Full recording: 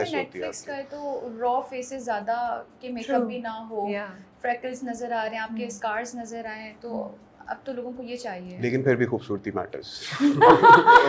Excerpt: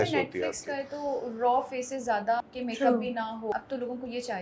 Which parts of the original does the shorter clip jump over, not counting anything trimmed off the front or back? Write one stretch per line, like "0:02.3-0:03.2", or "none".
0:02.4-0:02.7
0:03.8-0:07.5